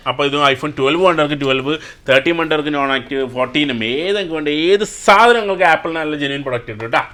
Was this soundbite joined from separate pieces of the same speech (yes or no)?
no